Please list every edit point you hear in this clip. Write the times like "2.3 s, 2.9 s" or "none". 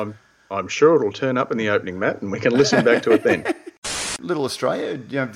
4.0 s